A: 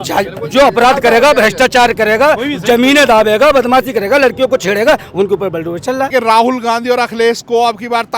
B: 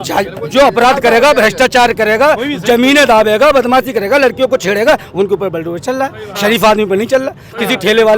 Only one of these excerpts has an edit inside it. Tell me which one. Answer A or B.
A